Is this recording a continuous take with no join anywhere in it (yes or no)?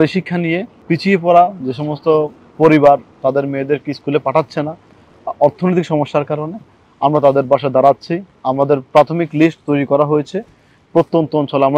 yes